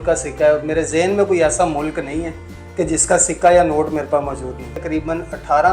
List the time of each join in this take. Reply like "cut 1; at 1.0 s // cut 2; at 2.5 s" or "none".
cut 1; at 4.8 s